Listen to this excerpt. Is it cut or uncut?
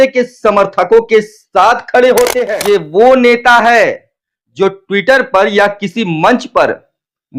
cut